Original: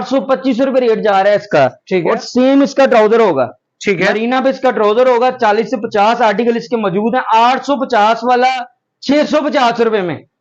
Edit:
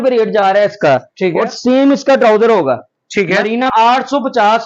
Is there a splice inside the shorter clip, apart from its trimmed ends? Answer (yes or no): yes